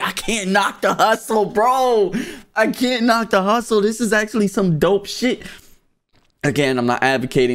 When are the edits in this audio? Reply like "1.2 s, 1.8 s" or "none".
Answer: none